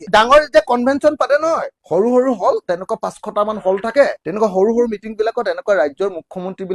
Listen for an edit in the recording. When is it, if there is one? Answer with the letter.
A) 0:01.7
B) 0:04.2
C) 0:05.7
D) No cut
A